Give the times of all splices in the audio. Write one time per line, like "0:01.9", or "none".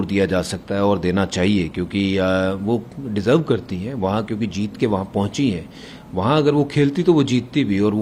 none